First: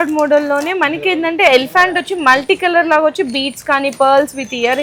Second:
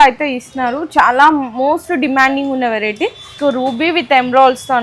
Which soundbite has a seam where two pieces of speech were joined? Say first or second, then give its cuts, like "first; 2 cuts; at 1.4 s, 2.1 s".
second; 1 cut; at 3.3 s